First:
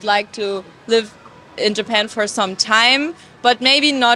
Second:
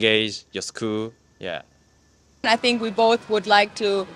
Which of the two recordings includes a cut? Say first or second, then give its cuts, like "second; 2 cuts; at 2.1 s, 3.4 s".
second; 1 cut; at 2.4 s